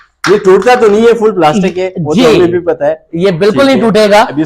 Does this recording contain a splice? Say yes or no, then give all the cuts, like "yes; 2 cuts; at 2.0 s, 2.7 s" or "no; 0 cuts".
no; 0 cuts